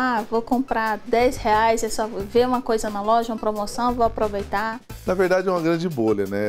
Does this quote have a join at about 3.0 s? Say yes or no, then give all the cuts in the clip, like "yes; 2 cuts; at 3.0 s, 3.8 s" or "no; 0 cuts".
no; 1 cut; at 4.9 s